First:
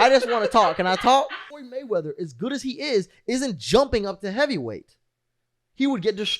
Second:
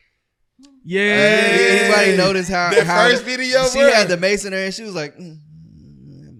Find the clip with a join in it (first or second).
first